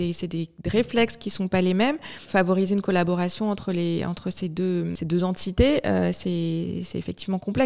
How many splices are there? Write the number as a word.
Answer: two